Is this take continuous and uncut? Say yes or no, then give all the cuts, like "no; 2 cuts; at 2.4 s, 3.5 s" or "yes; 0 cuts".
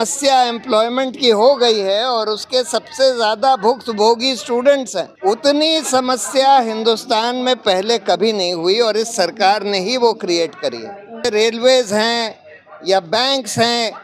no; 2 cuts; at 5.1 s, 11.3 s